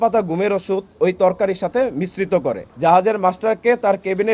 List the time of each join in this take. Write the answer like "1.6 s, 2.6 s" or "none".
2.7 s